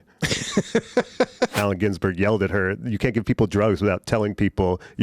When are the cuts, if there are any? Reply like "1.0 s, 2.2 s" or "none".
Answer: 1.6 s

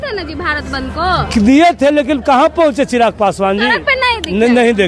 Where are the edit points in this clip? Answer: none

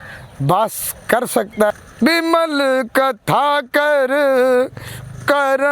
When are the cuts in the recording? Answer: 1.7 s

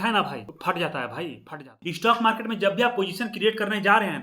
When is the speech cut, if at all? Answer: 1.7 s

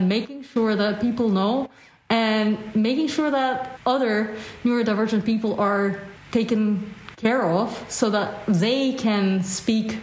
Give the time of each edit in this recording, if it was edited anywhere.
3.7 s, 6.1 s

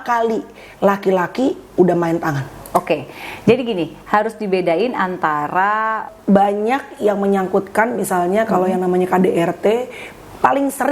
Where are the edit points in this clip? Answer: 6.1 s

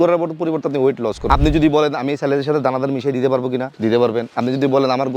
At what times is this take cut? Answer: 1.2 s

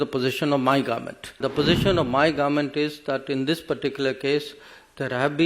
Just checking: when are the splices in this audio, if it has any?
1.4 s

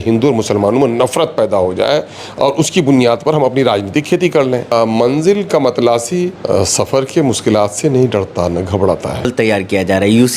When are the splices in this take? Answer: 4.7 s, 6.4 s, 9.3 s

